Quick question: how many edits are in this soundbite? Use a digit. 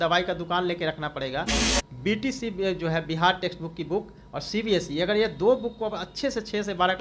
1